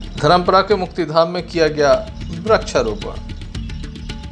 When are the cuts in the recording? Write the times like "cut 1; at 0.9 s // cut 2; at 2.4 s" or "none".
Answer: cut 1; at 3.2 s